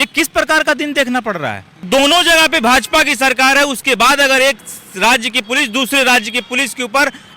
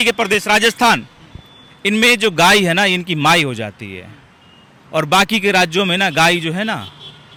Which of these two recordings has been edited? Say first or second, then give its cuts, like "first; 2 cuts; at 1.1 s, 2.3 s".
first; 1 cut; at 1.9 s